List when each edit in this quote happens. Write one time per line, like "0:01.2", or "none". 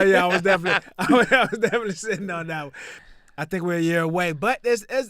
0:03.0